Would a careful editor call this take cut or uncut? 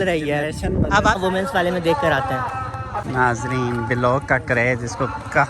cut